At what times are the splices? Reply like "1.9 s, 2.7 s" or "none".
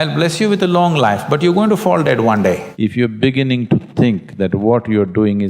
2.7 s